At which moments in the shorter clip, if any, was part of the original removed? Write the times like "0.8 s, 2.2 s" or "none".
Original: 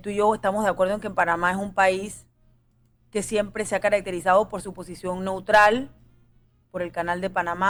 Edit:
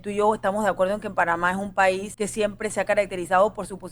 2.1 s